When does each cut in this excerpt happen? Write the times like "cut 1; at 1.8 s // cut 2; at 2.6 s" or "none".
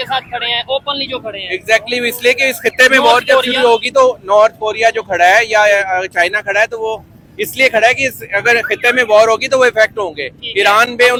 none